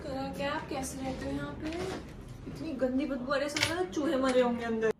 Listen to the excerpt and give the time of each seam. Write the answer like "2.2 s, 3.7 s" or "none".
none